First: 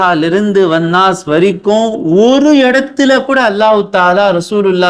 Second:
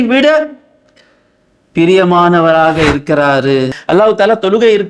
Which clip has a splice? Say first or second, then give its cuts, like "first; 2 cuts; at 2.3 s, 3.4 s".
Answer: second; 1 cut; at 3.8 s